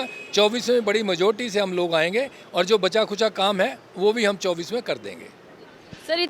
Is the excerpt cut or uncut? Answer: uncut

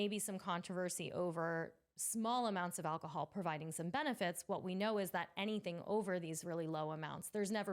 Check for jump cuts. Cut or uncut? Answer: uncut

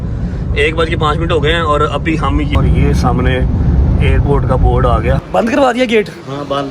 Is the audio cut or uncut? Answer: cut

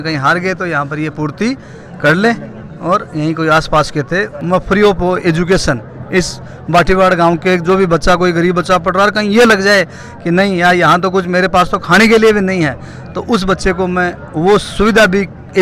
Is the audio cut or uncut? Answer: cut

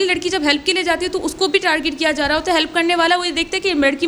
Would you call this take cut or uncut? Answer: uncut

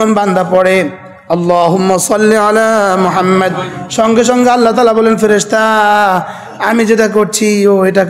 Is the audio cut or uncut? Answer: uncut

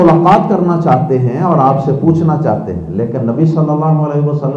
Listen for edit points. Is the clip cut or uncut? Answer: uncut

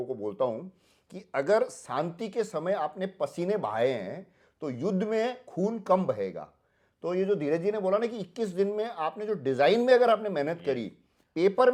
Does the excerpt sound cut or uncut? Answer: uncut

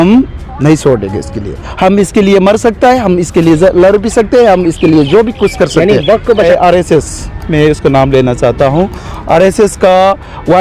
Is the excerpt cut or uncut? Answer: cut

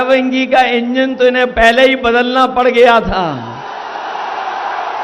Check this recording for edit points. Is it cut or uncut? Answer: uncut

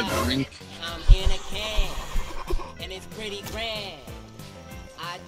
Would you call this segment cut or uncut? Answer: uncut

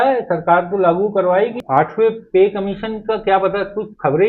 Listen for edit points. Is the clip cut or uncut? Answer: cut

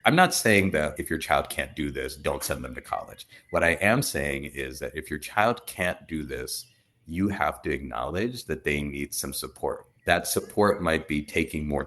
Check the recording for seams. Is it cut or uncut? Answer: cut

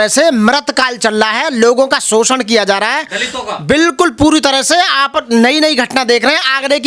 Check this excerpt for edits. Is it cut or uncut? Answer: uncut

